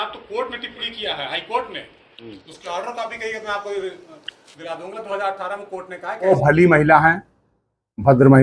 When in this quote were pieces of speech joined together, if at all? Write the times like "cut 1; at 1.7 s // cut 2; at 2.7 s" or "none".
cut 1; at 6.3 s